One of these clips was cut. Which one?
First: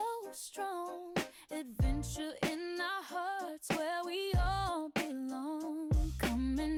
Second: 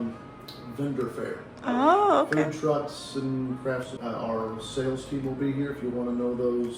second; 1 cut; at 3.9 s

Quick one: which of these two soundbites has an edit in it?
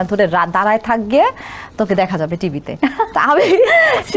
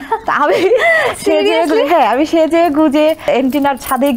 second; 1 cut; at 3.2 s

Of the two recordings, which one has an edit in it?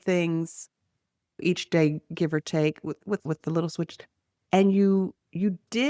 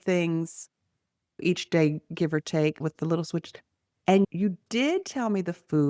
second; 2 cuts; at 2.8 s, 4.3 s

